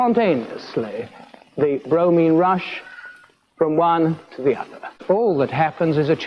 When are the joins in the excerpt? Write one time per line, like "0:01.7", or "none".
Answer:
0:05.0